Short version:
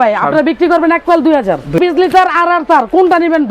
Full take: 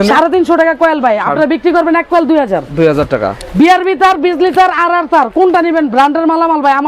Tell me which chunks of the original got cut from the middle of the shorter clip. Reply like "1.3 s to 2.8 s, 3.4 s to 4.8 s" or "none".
2.8 s to 4.2 s